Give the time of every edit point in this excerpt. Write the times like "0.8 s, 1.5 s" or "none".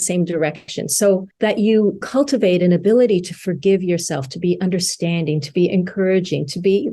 1.3 s, 2.0 s